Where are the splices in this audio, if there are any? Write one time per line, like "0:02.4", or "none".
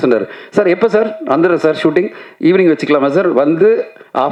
none